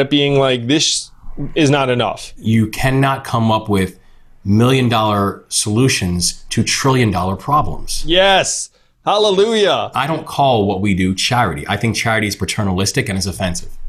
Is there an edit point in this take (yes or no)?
yes